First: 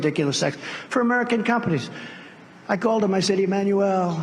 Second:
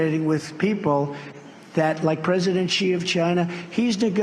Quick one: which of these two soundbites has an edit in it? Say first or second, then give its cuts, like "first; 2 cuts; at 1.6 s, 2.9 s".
second; 1 cut; at 1.6 s